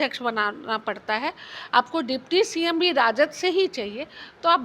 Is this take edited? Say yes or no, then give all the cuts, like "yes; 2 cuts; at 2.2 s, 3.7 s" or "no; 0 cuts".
no; 0 cuts